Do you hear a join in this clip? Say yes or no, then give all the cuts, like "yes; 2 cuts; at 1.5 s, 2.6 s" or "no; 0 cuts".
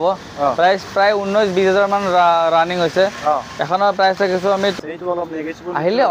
yes; 1 cut; at 4.8 s